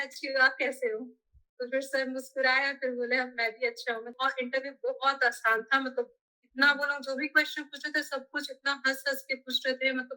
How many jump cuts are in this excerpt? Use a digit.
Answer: 1